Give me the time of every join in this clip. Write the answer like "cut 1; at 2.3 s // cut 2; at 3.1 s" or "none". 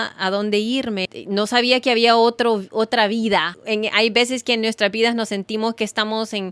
cut 1; at 1.1 s // cut 2; at 3.6 s